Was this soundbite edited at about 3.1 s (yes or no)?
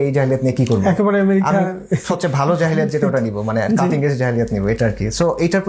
no